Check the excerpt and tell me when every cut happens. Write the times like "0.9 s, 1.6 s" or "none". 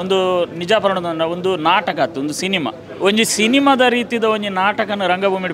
2.8 s